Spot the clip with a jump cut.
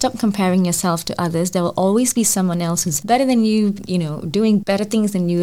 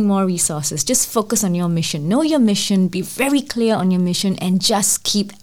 first; 3 cuts; at 2.9 s, 3.8 s, 4.6 s

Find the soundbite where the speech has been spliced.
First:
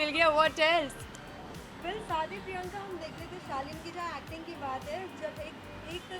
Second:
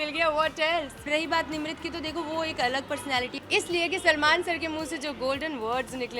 second; 2 cuts; at 1.1 s, 3.3 s

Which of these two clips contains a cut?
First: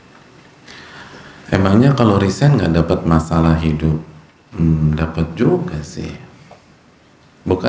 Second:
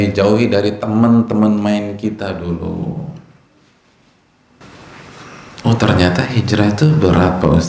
second; 1 cut; at 4.6 s

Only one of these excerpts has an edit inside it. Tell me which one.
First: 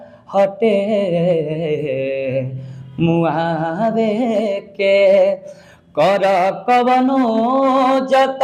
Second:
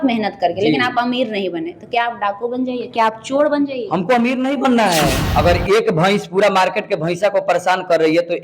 second; 1 cut; at 5.2 s

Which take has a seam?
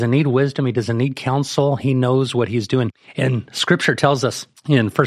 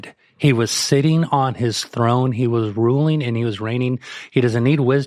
first; 1 cut; at 3.0 s

